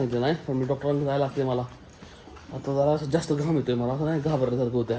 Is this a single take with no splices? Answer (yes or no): yes